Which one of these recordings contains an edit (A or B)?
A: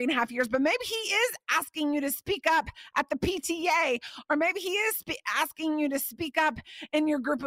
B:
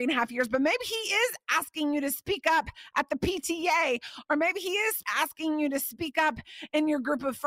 B